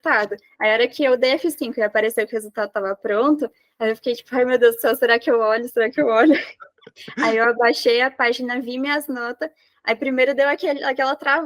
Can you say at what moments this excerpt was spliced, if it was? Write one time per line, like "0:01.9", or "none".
none